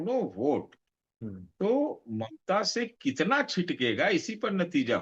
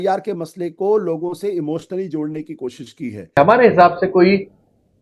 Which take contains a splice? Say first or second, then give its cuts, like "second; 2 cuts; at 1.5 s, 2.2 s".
second; 1 cut; at 3.4 s